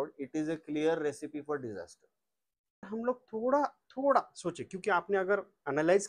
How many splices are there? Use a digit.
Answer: 1